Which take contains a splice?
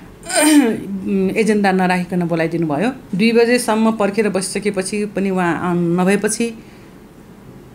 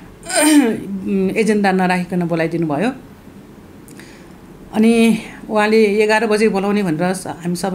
first; 1 cut; at 3.0 s

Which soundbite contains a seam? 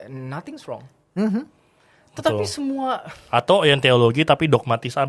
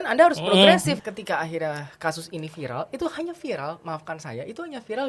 second; 1 cut; at 1.1 s

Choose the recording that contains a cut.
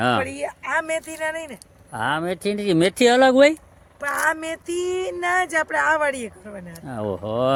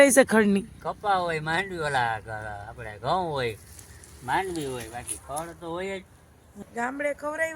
second; 1 cut; at 6.5 s

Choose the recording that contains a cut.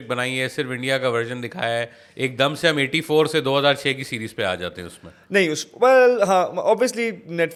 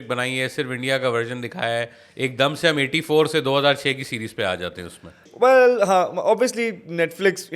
second; 1 cut; at 5.2 s

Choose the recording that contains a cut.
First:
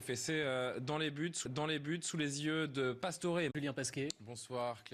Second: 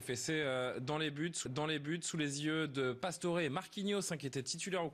second; 1 cut; at 3.5 s

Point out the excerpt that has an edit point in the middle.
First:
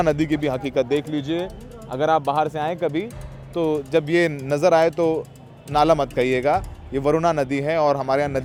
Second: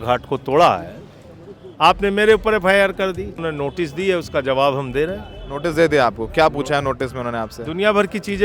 second; 1 cut; at 3.4 s

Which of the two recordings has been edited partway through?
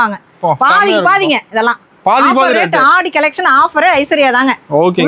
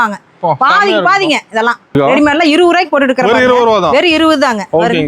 second; 1 cut; at 1.9 s

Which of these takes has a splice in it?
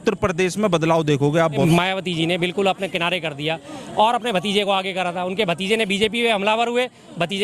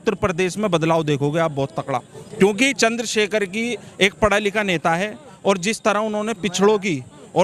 first; 1 cut; at 1.6 s

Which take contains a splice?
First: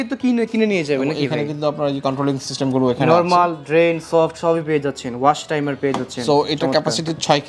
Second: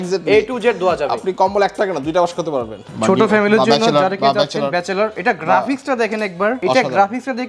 second; 2 cuts; at 2.8 s, 6.6 s

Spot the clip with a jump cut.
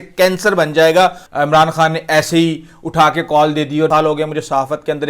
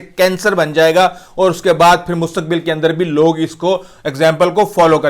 first; 2 cuts; at 1.2 s, 3.9 s

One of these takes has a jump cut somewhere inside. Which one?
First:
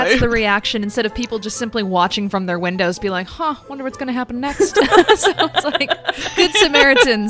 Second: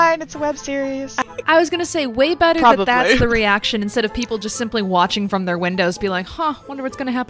second; 1 cut; at 1.2 s

